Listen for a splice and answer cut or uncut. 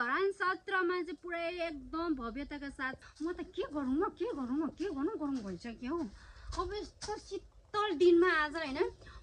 cut